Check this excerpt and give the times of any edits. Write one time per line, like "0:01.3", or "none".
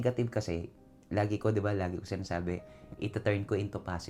none

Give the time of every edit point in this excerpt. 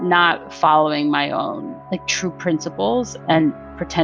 none

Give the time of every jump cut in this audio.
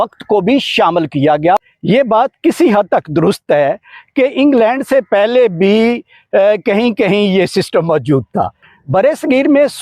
0:01.6
0:08.6

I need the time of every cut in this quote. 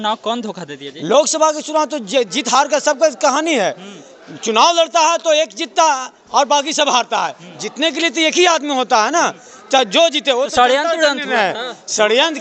none

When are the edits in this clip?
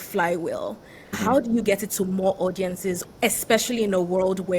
0:01.1
0:03.0

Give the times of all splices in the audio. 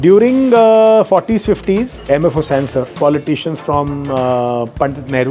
0:01.9
0:02.9

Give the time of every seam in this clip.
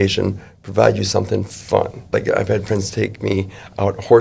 0:02.1

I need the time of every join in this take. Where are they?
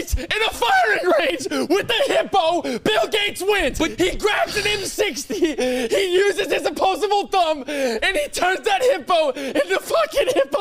none

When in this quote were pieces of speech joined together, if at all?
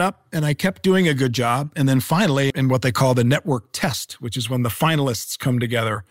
none

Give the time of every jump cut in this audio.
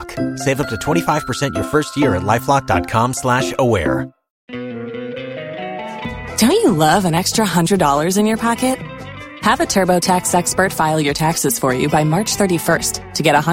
0:04.4

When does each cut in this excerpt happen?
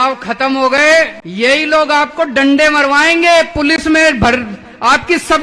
0:01.2

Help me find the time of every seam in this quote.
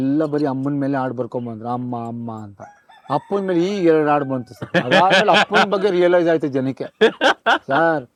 none

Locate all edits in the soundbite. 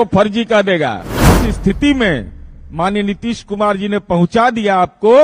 0:01.2

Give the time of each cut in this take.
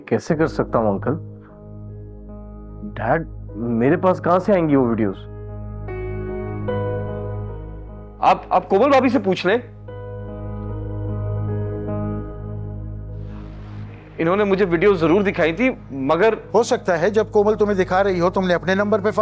none

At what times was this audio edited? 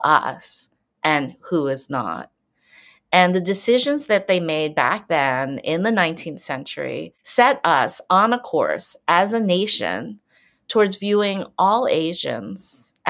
0:07.2

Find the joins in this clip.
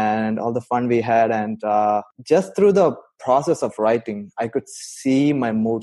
0:02.1

